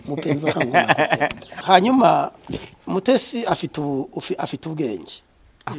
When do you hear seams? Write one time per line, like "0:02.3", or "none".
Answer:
0:01.5